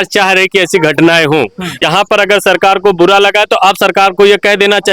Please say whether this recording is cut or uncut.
cut